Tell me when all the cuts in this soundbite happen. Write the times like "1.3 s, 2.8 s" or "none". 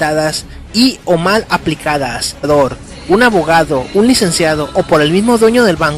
none